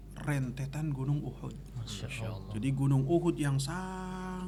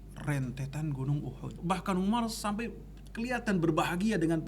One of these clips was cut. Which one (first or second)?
second